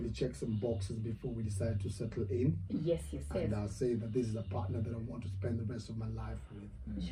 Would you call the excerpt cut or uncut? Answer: uncut